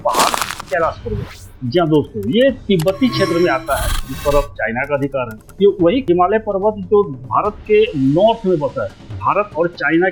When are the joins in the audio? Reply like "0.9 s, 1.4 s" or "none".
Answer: none

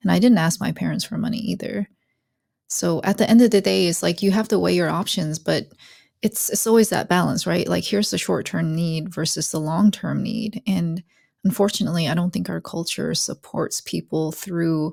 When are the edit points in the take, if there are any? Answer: none

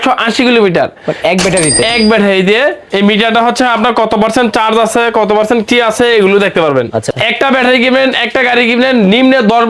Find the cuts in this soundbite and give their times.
2.8 s, 7.1 s

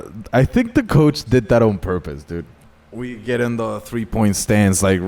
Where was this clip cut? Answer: 2.5 s

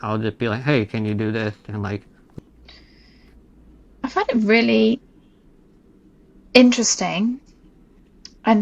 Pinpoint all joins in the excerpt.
2.3 s

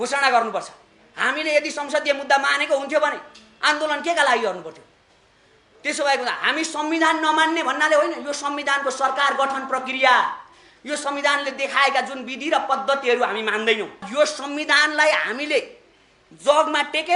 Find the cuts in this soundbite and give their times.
14.1 s

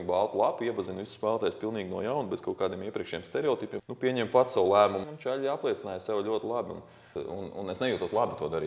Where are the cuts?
3.8 s, 5.1 s, 7.2 s

